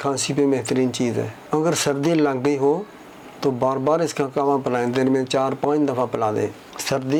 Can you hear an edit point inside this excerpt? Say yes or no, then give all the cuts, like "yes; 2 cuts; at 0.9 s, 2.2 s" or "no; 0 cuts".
no; 0 cuts